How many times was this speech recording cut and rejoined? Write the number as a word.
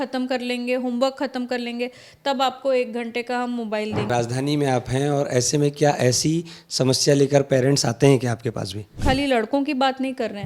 two